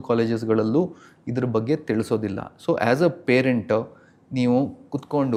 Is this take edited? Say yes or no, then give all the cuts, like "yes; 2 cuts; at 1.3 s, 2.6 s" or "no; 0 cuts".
no; 0 cuts